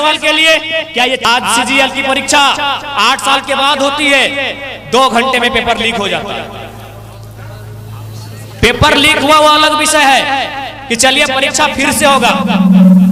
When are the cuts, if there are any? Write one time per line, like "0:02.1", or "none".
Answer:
0:01.3